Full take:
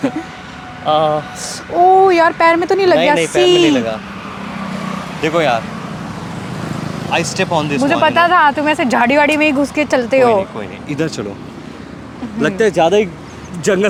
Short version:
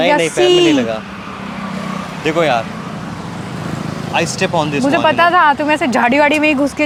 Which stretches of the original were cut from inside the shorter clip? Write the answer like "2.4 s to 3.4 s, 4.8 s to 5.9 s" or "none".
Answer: none